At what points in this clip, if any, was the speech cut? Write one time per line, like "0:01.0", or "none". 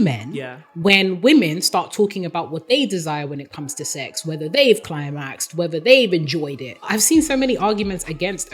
0:06.9